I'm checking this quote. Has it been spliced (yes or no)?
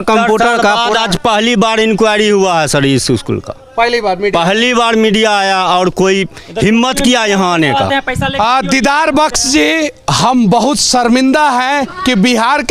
no